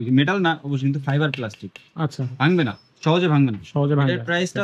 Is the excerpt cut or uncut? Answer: uncut